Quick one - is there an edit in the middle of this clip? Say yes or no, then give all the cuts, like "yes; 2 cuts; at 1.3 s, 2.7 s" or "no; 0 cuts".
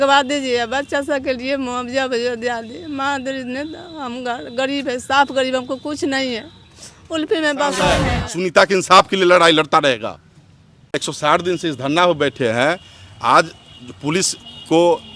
yes; 2 cuts; at 8.2 s, 10.9 s